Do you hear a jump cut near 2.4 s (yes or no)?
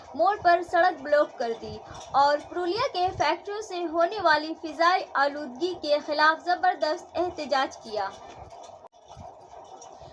no